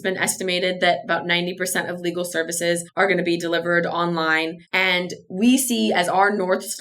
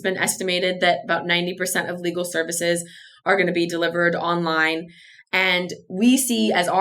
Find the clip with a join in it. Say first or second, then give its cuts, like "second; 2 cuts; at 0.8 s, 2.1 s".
first; 2 cuts; at 2.9 s, 4.6 s